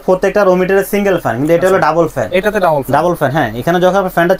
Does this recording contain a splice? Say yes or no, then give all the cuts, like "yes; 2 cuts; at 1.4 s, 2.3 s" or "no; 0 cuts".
no; 0 cuts